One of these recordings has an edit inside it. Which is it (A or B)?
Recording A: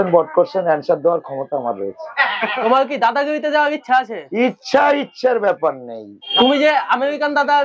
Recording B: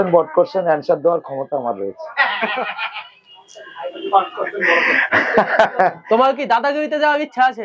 A